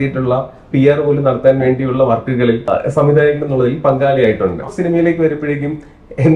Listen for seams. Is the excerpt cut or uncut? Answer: cut